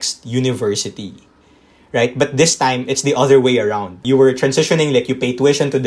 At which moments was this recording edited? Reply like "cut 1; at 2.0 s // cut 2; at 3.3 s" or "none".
cut 1; at 4.0 s

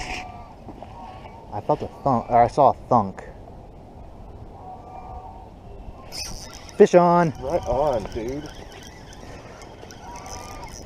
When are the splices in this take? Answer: none

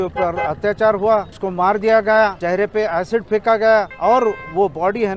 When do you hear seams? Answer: cut 1; at 1.3 s // cut 2; at 2.4 s // cut 3; at 3.9 s

